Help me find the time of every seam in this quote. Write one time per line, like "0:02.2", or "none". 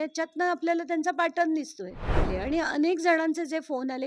0:02.3